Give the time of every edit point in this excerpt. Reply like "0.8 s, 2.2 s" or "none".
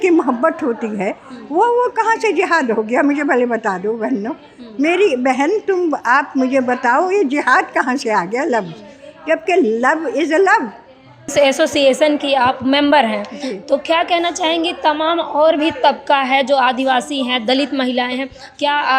11.3 s